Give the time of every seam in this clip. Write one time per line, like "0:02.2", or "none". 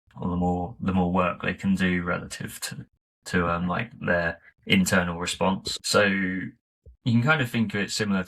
0:05.7